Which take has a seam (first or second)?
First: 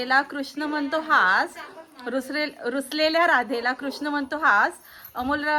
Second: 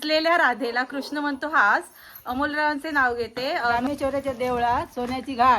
second